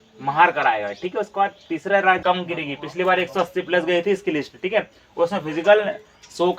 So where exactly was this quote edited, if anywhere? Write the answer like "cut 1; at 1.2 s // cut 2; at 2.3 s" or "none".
cut 1; at 2.2 s